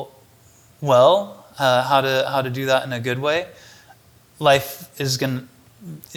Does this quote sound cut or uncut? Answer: uncut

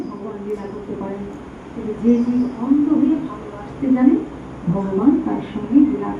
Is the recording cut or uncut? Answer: uncut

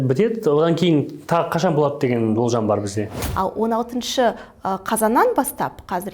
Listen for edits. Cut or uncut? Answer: cut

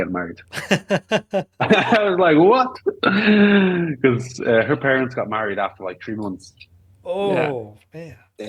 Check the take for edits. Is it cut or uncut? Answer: uncut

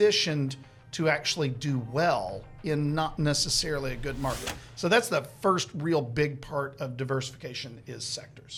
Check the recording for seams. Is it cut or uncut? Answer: uncut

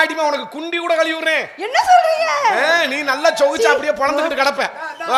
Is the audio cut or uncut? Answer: uncut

